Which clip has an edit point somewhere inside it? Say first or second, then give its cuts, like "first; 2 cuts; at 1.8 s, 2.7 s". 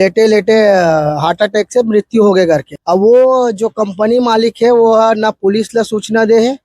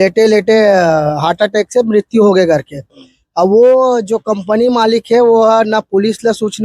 first; 1 cut; at 2.7 s